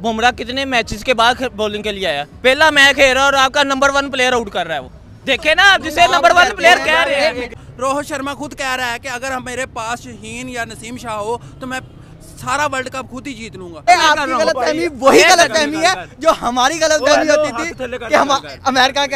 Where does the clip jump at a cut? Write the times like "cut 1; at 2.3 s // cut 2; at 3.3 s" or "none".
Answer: cut 1; at 7.5 s // cut 2; at 13.9 s